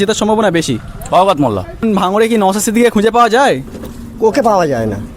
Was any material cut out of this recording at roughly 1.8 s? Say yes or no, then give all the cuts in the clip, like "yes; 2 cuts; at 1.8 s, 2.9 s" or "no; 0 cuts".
yes; 1 cut; at 1.8 s